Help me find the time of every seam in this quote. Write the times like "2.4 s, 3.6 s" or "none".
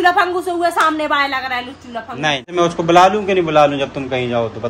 2.5 s